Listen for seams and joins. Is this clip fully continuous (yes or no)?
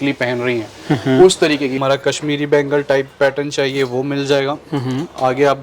no